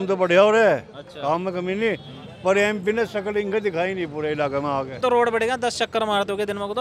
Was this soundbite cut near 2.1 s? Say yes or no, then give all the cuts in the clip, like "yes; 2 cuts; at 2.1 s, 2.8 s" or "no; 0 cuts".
no; 1 cut; at 4.9 s